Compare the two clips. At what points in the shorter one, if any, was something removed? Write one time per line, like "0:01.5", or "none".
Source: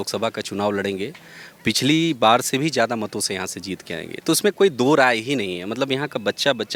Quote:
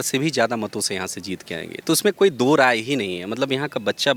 none